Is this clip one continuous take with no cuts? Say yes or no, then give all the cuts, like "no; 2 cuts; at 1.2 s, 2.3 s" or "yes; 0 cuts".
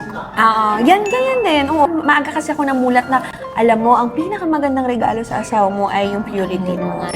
no; 1 cut; at 1.8 s